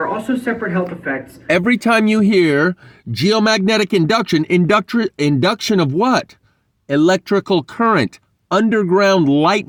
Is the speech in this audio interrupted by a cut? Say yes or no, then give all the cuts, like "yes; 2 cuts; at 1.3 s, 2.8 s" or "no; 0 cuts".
no; 0 cuts